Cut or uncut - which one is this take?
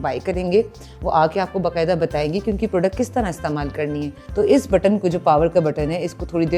cut